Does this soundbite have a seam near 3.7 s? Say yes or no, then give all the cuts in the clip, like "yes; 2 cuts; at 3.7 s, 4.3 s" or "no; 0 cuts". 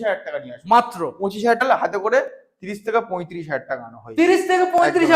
no; 1 cut; at 1.6 s